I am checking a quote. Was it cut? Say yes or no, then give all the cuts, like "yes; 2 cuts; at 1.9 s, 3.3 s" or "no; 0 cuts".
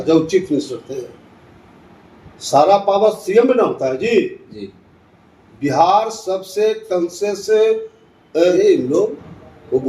yes; 1 cut; at 8.5 s